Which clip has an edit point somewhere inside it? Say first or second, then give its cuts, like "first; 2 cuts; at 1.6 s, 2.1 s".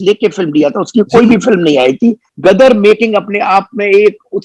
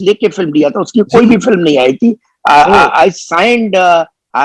first; 1 cut; at 2.3 s